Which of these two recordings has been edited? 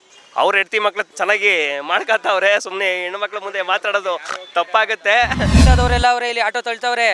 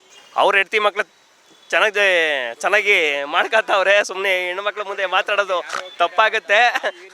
first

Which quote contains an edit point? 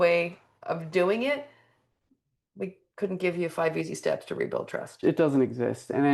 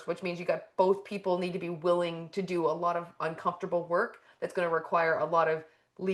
first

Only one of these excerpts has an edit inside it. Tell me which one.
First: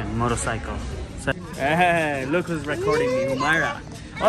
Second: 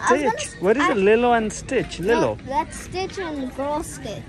first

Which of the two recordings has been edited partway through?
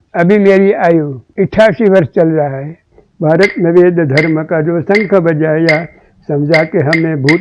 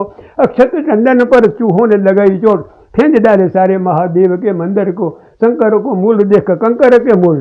first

